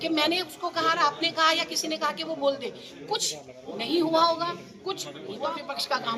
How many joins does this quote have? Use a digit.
1